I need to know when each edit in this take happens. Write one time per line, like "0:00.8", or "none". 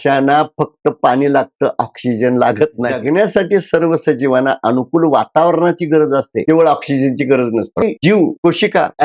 0:03.0
0:07.8